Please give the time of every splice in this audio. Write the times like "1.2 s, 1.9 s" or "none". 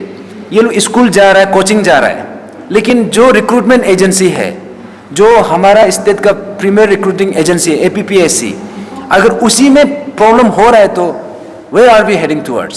none